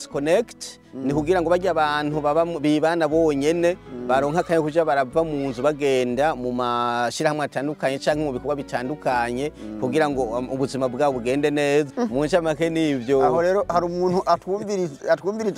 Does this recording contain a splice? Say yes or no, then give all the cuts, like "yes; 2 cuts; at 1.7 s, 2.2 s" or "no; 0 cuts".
yes; 1 cut; at 11.9 s